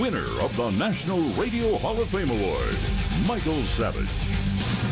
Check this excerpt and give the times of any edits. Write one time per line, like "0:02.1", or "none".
0:04.0

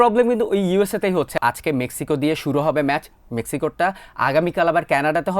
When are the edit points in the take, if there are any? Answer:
0:01.4

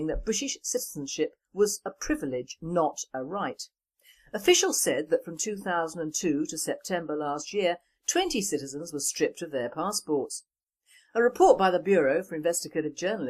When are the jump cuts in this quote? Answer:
none

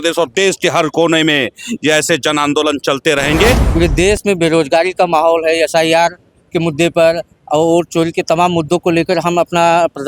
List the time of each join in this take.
0:03.7

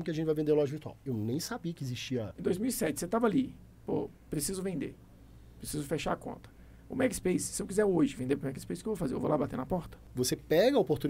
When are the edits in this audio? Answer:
0:02.3
0:10.0

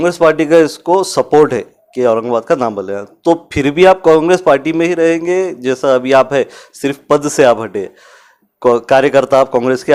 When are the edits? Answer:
none

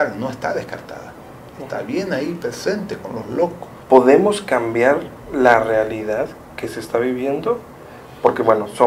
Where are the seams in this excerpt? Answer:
0:03.7

